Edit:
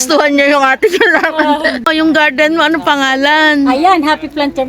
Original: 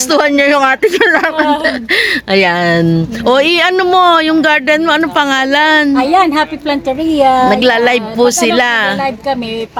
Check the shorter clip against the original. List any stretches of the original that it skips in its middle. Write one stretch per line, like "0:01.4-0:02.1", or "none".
0:01.9-0:04.2